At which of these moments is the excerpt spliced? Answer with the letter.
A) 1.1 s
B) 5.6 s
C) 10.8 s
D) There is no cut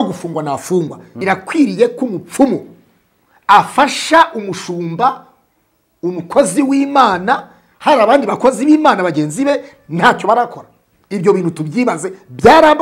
A